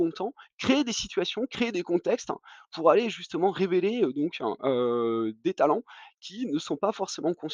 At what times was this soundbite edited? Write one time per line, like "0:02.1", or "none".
none